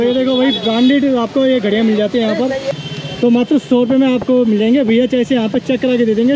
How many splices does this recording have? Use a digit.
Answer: 1